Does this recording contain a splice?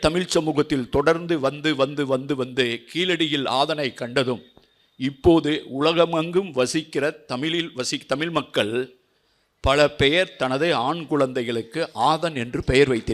no; 0 cuts

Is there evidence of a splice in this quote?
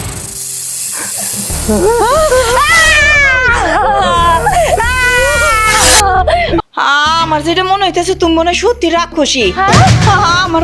yes; 1 cut; at 6.6 s

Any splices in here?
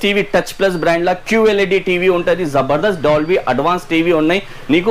no; 0 cuts

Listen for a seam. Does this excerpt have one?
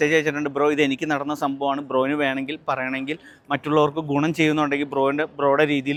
no; 0 cuts

